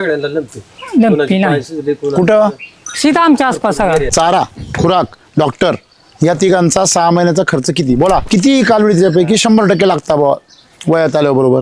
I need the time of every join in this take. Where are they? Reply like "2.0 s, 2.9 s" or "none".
4.1 s, 8.2 s